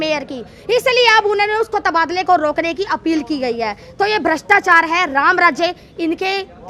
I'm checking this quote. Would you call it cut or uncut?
uncut